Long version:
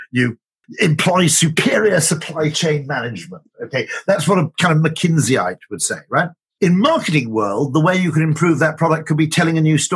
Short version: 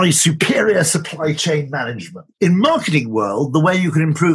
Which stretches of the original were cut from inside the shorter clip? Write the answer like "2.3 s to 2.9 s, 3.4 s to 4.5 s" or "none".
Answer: 3.4 s to 6.4 s